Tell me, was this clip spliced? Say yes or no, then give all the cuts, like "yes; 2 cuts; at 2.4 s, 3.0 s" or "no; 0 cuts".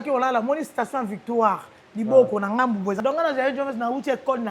yes; 1 cut; at 3.0 s